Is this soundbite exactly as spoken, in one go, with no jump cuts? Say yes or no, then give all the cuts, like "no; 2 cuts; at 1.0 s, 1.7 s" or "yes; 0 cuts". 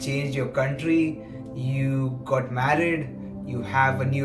yes; 0 cuts